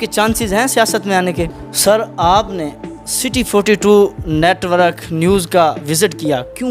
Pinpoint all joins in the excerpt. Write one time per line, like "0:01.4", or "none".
0:01.6

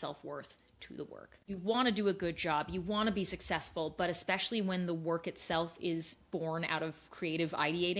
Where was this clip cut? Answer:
0:01.3

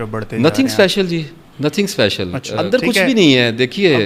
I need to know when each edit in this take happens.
0:02.4

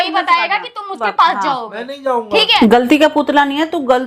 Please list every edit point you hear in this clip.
0:02.5

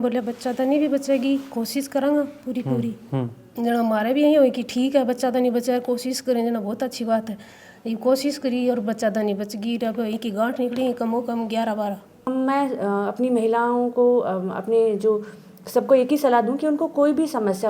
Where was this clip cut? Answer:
0:12.3

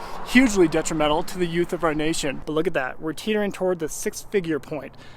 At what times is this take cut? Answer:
0:02.4

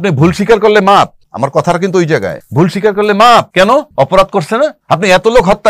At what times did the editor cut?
0:01.2
0:02.4
0:03.7
0:04.8

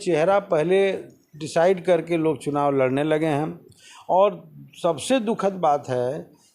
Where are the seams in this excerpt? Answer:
none

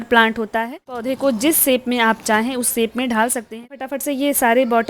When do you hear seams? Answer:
0:01.1
0:03.8

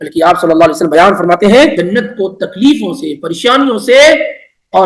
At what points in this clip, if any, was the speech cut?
0:01.8

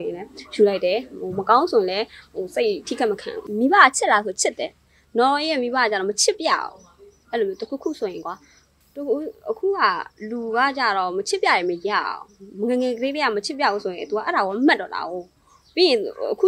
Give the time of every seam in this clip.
0:03.4

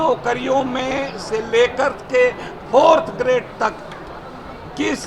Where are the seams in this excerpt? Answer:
none

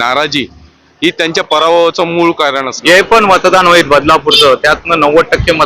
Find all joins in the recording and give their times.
0:02.7

